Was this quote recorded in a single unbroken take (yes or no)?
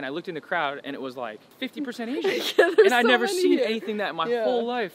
yes